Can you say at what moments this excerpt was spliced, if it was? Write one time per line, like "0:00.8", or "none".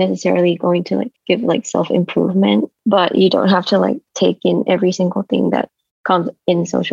0:01.1
0:02.7